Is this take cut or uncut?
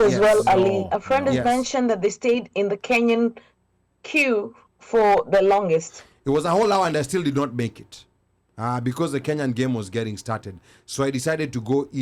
uncut